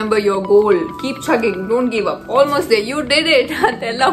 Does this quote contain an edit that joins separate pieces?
no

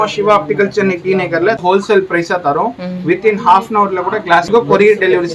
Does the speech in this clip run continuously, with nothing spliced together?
no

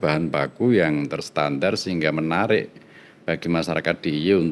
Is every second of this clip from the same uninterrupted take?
yes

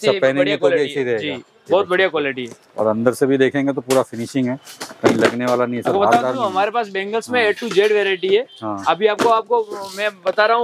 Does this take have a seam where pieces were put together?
no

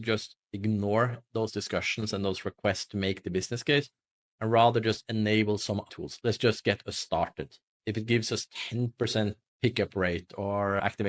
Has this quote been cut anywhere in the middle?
yes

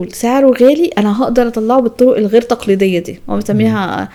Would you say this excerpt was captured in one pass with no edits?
yes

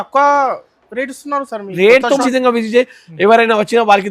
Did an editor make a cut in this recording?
yes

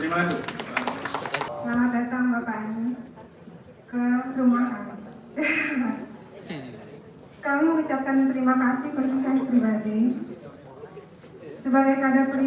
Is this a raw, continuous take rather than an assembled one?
no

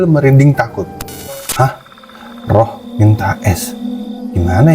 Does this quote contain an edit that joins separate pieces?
yes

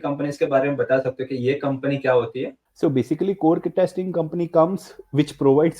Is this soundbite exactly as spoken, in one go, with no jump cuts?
no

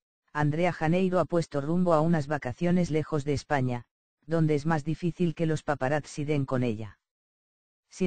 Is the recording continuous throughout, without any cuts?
no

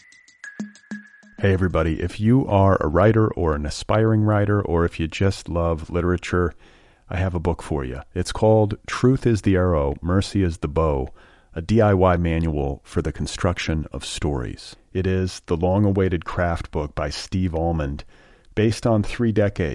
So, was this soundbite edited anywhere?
yes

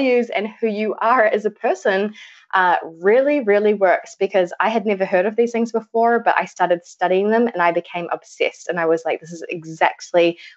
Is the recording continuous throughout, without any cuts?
yes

